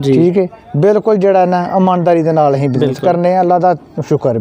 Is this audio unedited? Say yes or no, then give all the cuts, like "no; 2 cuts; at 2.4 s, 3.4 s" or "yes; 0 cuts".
yes; 0 cuts